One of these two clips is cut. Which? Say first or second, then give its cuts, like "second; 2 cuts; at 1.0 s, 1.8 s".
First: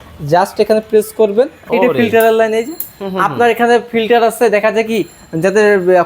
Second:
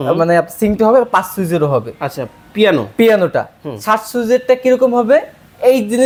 first; 1 cut; at 1.6 s